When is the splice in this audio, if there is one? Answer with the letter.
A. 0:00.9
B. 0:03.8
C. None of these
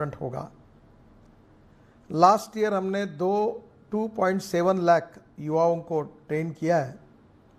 C